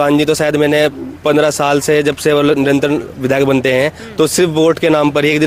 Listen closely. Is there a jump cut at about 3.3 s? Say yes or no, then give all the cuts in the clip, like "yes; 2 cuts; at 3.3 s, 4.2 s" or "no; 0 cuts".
no; 0 cuts